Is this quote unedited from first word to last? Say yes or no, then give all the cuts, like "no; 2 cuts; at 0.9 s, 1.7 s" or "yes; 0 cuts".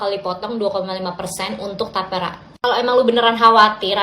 no; 1 cut; at 2.5 s